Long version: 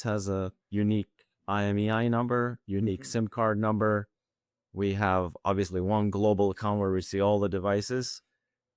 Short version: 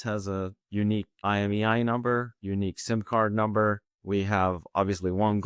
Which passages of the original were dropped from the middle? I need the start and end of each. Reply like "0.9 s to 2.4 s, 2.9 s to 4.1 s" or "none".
1.1 s to 1.4 s, 4.2 s to 4.6 s